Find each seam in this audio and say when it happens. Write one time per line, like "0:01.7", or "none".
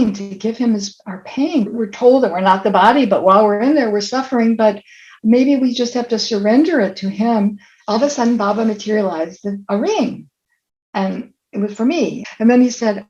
0:01.7
0:07.7
0:12.2